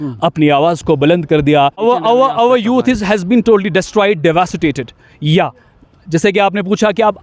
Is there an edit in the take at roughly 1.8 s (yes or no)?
yes